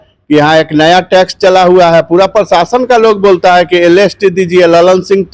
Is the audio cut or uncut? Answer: uncut